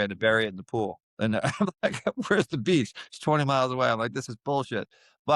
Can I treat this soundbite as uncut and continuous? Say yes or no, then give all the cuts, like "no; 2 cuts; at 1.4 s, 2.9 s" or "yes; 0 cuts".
yes; 0 cuts